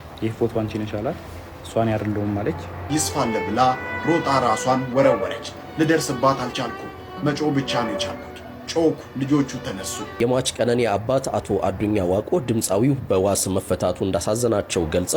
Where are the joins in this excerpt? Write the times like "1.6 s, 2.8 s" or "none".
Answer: 2.8 s, 10.0 s